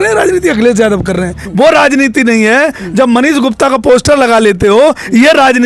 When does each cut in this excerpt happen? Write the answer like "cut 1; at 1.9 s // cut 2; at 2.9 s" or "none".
cut 1; at 1.4 s